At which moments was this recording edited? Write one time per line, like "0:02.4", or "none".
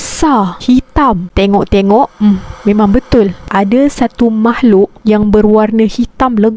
0:01.3

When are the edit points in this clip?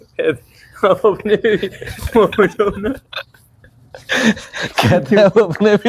none

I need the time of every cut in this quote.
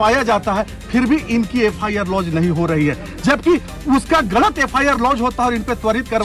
none

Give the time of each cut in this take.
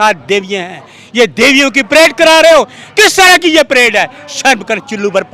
none

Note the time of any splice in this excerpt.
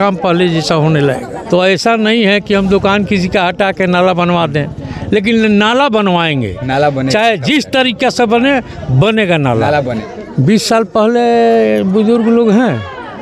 0:01.3
0:10.0

